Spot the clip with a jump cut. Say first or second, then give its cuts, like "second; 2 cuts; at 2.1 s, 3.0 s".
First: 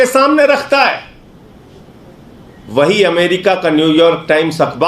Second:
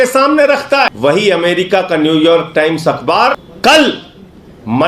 second; 2 cuts; at 0.9 s, 3.5 s